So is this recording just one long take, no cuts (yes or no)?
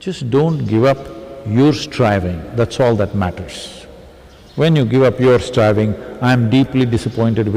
yes